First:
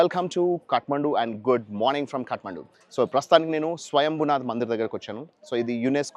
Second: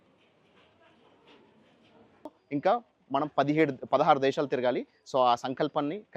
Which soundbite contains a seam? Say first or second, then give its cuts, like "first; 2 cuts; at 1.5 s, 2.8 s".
second; 1 cut; at 2.4 s